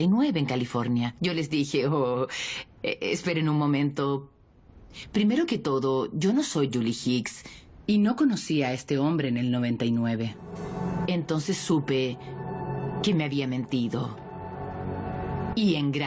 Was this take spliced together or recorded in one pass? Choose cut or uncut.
uncut